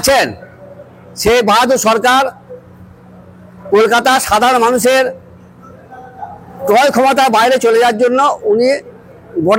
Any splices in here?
no; 0 cuts

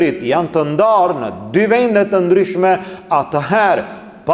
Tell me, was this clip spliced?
no; 0 cuts

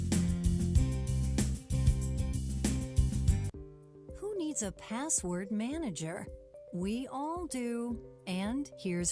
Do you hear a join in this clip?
no; 0 cuts

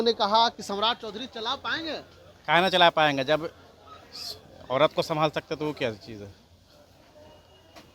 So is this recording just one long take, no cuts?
yes; 0 cuts

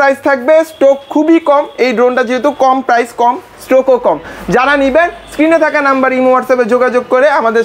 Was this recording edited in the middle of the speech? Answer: no; 0 cuts

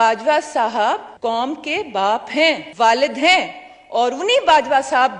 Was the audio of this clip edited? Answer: yes; 2 cuts; at 1.1 s, 2.7 s

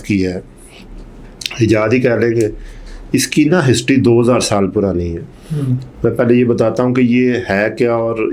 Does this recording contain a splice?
no; 0 cuts

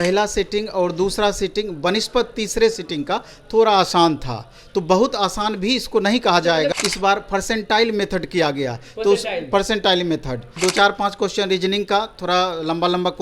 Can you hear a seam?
yes; 2 cuts; at 6.7 s, 10.4 s

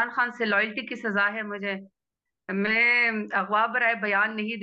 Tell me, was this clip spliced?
no; 0 cuts

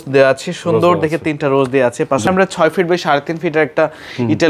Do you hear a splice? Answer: yes; 1 cut; at 2.3 s

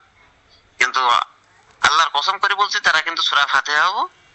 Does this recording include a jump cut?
no; 0 cuts

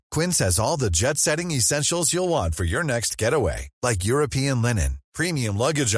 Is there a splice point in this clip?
no; 0 cuts

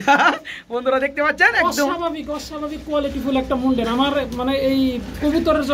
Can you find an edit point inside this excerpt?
no; 0 cuts

